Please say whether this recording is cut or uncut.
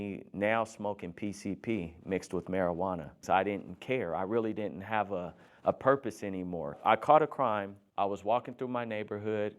cut